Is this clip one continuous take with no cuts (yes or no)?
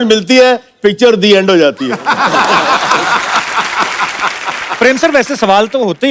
no